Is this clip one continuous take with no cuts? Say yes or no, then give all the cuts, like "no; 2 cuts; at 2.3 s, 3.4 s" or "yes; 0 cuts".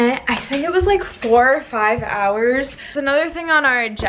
no; 1 cut; at 2.9 s